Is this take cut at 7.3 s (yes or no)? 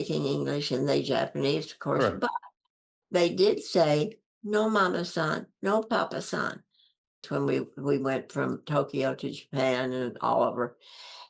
yes